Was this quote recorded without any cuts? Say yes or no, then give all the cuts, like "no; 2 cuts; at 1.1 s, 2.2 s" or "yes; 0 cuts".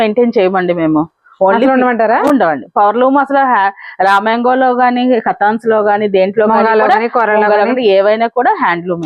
yes; 0 cuts